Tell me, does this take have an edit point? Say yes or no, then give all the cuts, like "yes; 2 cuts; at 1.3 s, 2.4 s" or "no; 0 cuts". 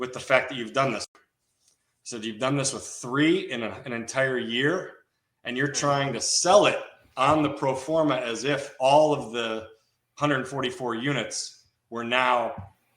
yes; 1 cut; at 1.1 s